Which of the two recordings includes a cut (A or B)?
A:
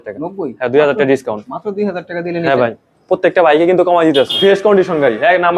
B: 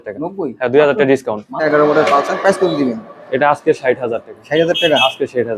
B